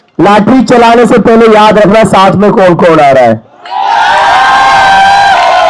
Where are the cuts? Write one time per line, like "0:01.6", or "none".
none